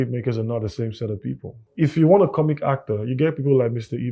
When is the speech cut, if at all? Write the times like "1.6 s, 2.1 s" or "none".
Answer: 1.6 s